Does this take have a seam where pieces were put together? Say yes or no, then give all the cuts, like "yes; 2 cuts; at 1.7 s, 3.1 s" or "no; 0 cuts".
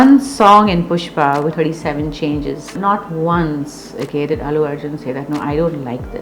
yes; 2 cuts; at 1.5 s, 2.8 s